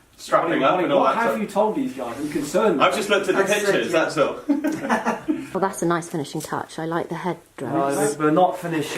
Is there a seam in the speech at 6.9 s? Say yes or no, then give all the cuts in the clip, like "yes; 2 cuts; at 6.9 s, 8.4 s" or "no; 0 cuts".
no; 1 cut; at 5.4 s